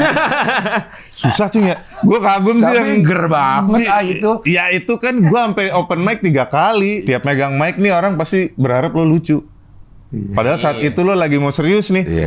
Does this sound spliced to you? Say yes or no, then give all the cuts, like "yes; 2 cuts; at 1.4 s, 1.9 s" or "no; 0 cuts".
yes; 2 cuts; at 1.9 s, 7.0 s